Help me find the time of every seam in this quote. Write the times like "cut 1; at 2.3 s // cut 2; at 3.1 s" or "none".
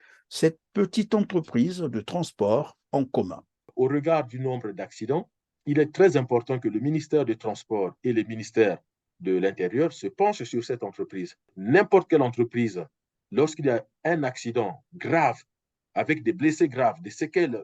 cut 1; at 3.7 s // cut 2; at 11.5 s